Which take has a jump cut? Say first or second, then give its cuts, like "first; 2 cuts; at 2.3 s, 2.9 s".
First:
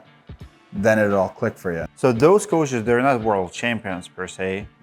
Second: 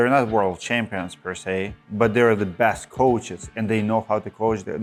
first; 1 cut; at 1.9 s